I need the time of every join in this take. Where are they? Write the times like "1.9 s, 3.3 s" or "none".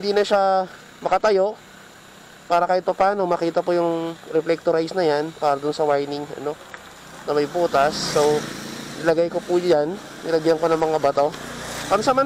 none